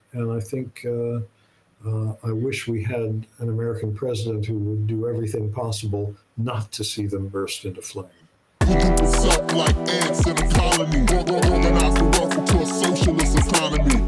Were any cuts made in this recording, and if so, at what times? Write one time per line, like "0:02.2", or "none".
0:08.6